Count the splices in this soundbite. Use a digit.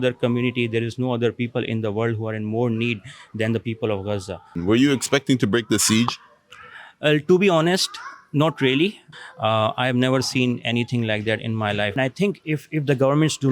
3